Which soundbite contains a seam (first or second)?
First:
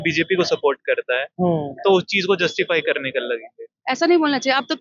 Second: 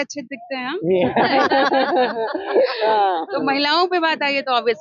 first